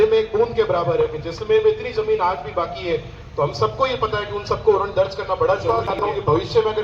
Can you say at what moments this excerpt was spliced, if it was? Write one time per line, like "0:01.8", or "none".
0:05.8